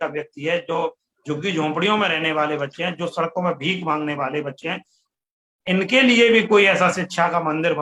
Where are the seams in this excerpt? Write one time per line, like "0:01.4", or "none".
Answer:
none